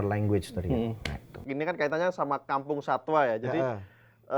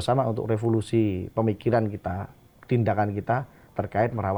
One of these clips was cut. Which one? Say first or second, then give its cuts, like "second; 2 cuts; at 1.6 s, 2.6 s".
first; 1 cut; at 1.4 s